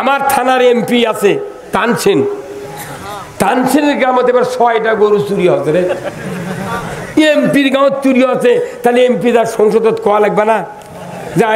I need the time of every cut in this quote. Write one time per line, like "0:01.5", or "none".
none

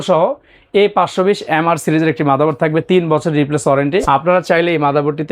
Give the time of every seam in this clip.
0:04.0

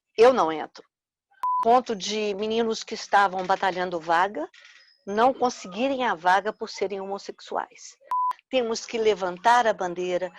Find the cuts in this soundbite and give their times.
0:01.6
0:08.2

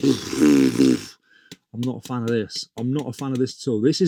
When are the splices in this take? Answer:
none

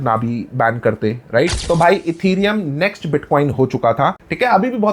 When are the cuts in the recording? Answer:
0:01.6

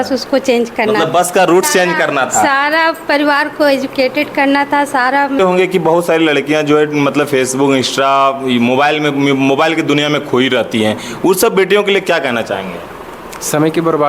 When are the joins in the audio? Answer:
0:05.4

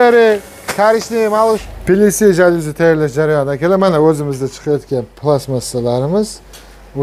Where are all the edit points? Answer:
0:01.7

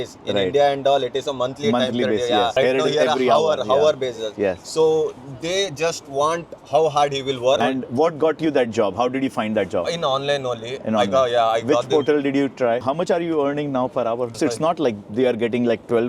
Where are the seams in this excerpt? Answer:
0:07.6
0:12.8
0:14.4

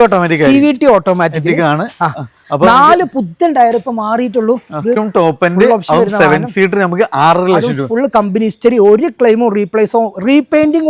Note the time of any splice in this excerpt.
0:05.0

